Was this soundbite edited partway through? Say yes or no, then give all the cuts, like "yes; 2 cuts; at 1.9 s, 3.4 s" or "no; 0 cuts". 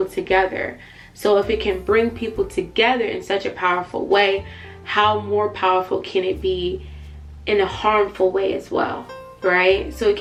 no; 0 cuts